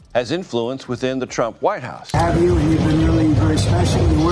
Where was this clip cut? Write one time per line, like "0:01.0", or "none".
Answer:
0:02.0